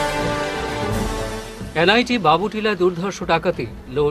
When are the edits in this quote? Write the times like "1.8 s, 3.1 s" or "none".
1.1 s